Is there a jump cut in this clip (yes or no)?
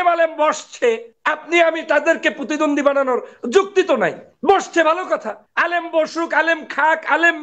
yes